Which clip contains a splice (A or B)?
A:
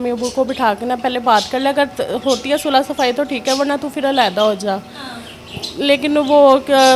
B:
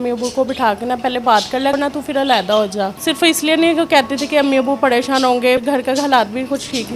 B